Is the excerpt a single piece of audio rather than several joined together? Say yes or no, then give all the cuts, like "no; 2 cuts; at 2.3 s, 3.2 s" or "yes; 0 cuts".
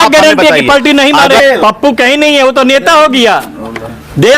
no; 1 cut; at 1.4 s